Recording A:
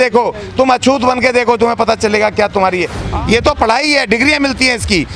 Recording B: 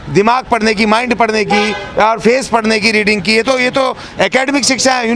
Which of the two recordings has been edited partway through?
A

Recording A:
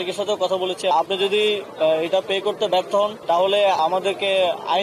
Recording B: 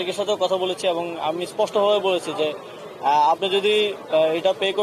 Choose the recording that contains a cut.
A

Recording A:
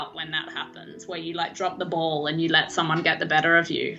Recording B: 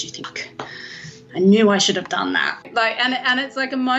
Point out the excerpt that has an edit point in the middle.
B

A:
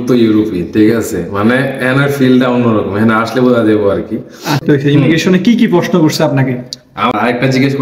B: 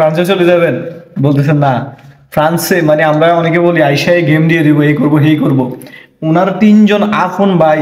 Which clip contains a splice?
A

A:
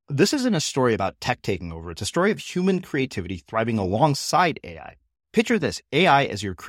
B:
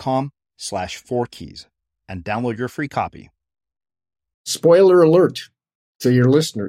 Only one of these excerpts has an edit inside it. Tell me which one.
B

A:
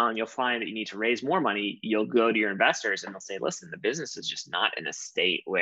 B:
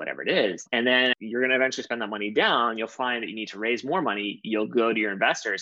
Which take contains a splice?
B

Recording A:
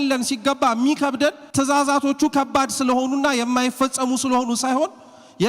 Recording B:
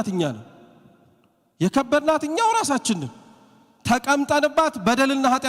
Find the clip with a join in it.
A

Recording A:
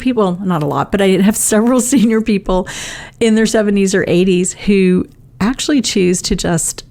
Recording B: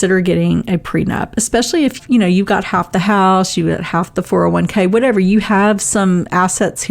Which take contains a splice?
B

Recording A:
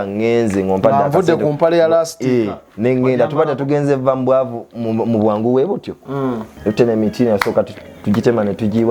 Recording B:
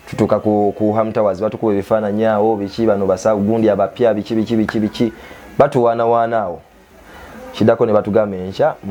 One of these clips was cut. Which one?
A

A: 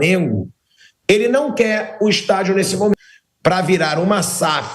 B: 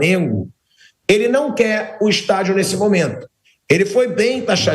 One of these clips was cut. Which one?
A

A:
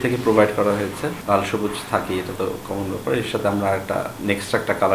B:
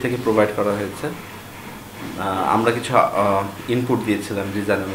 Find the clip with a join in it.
A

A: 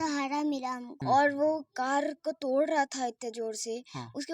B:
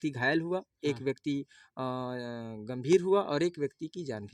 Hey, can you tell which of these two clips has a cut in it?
A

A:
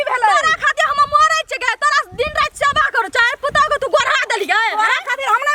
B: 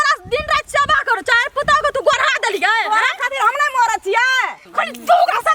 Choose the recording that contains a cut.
B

